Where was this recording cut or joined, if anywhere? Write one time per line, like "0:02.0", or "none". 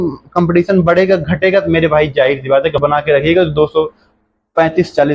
0:02.8